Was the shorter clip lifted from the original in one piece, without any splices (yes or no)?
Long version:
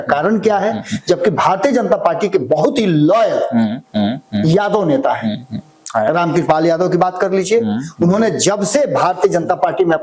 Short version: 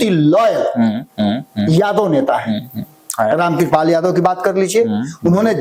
yes